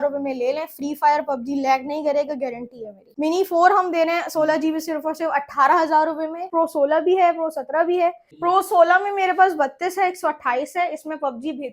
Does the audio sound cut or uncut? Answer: cut